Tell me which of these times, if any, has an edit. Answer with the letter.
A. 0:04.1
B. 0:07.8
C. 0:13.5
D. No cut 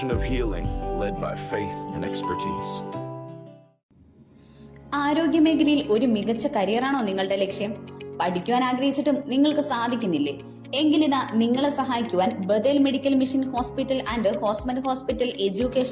D